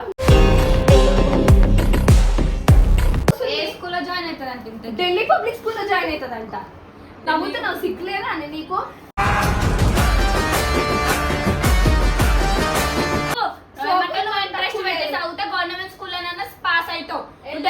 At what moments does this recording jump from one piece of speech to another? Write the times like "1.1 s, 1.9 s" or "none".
3.4 s, 13.4 s